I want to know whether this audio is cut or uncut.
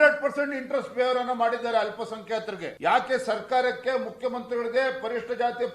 cut